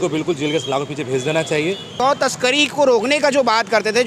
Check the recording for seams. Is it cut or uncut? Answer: cut